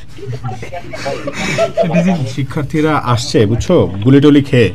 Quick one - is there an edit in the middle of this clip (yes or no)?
yes